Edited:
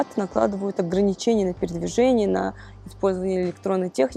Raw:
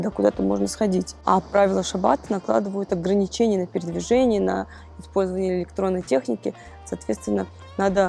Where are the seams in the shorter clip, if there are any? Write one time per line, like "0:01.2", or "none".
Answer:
none